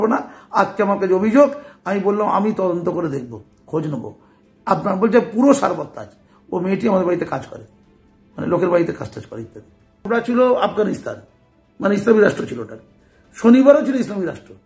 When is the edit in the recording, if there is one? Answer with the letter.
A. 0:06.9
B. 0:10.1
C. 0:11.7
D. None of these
B